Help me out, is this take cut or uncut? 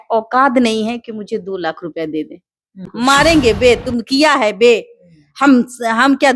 cut